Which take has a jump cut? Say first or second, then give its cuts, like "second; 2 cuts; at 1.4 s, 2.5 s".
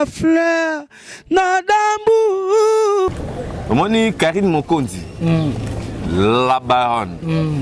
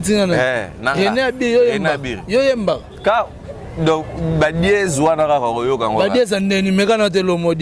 first; 1 cut; at 3.1 s